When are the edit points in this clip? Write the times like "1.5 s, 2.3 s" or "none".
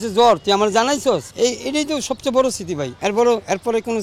1.3 s, 2.9 s